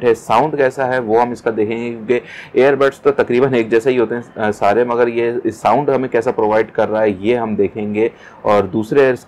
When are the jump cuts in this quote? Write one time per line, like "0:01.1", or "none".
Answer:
none